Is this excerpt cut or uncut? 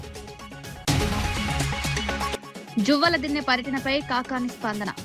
cut